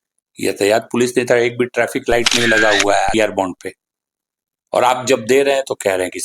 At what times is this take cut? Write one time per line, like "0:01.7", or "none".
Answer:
0:03.1